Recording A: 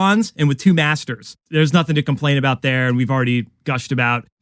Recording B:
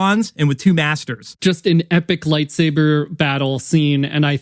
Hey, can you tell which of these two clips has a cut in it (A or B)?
B